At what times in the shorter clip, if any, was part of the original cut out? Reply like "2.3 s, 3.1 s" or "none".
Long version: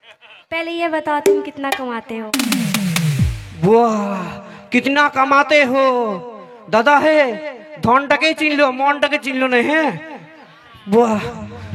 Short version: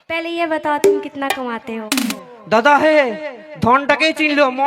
2.1 s